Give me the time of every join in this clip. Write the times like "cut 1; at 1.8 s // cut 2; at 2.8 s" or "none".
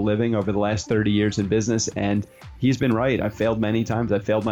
none